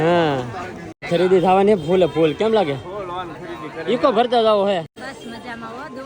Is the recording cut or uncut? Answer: cut